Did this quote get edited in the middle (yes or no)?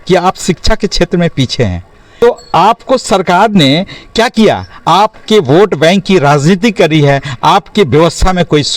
yes